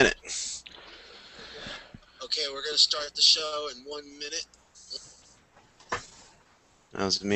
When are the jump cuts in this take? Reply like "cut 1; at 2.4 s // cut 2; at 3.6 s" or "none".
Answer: none